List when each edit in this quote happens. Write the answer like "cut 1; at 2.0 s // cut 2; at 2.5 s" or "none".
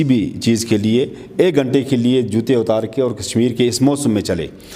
none